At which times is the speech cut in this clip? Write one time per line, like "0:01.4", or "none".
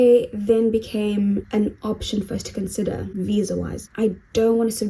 0:01.5
0:03.8